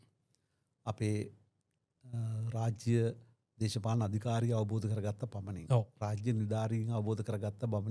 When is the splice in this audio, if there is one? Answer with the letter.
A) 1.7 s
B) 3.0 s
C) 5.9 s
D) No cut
D